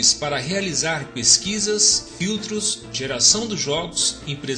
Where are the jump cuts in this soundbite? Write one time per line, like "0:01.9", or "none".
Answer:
none